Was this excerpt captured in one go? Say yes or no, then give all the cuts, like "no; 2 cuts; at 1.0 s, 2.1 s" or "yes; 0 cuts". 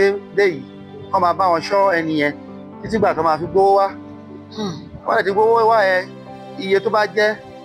yes; 0 cuts